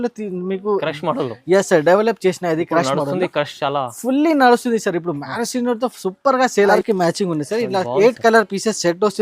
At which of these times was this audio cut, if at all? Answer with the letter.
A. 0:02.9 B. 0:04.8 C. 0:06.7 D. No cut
C